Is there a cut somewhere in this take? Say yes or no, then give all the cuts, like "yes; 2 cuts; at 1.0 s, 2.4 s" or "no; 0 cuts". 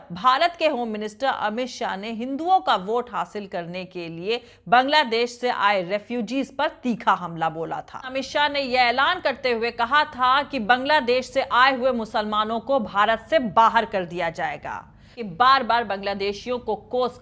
yes; 2 cuts; at 8.1 s, 15.2 s